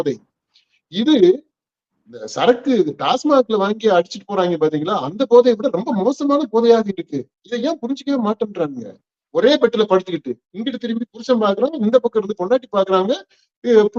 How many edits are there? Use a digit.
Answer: 1